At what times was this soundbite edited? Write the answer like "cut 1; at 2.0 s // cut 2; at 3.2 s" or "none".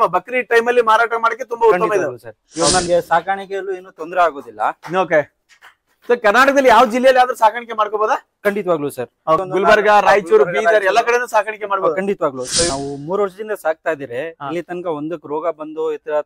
cut 1; at 2.9 s // cut 2; at 9.4 s // cut 3; at 12.7 s